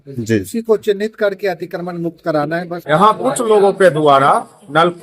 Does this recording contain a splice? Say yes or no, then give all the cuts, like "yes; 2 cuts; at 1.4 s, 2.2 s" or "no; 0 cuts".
yes; 1 cut; at 2.7 s